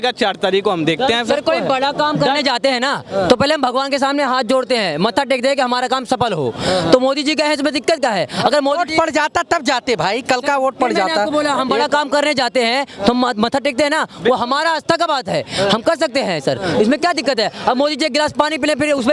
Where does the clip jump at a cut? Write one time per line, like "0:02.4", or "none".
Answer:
none